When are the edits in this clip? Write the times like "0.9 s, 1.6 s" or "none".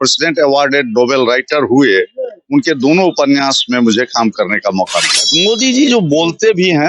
5.3 s